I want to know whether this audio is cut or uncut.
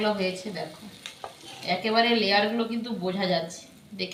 uncut